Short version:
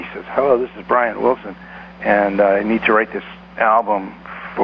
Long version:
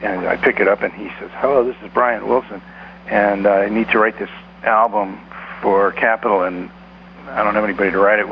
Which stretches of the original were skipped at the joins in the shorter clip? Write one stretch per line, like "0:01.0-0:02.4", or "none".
none